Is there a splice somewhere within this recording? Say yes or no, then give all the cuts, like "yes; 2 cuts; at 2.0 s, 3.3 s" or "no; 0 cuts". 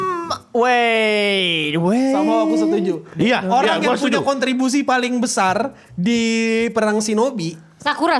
no; 0 cuts